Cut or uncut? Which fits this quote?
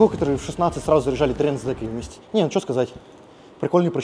cut